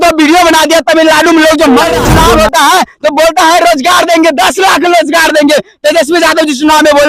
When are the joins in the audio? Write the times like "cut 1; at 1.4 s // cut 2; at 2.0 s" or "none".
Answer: cut 1; at 2.0 s